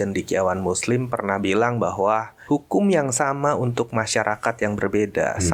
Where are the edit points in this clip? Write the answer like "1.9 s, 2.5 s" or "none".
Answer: 2.3 s